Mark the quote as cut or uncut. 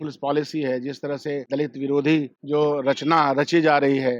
cut